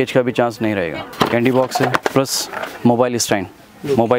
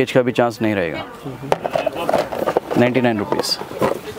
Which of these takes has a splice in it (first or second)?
first